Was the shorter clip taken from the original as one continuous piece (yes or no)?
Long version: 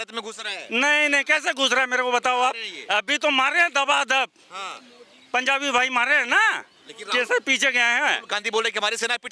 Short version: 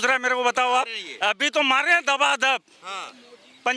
yes